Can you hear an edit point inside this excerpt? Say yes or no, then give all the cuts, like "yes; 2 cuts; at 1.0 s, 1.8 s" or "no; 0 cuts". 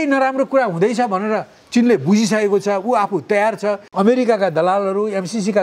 yes; 1 cut; at 3.8 s